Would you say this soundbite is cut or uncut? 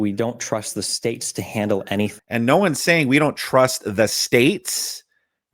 cut